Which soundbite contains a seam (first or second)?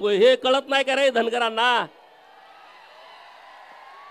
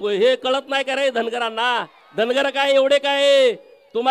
second